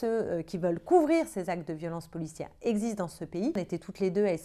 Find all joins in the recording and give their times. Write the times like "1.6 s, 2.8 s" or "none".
3.6 s